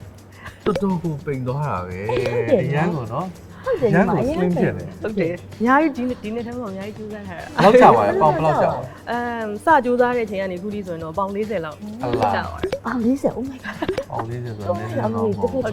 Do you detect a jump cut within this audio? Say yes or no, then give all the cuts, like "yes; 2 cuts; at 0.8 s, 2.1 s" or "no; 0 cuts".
no; 0 cuts